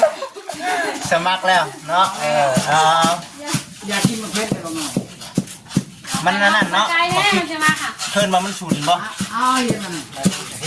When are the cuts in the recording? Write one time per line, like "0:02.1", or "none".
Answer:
none